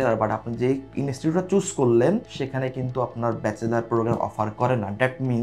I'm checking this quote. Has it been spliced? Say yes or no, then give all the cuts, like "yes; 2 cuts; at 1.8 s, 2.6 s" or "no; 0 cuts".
no; 0 cuts